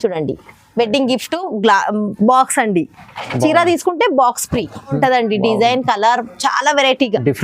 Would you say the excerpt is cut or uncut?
cut